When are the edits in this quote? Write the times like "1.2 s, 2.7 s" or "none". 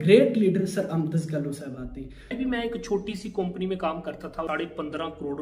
2.3 s, 4.5 s